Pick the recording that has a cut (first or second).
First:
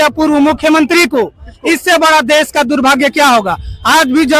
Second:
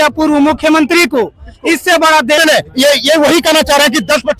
second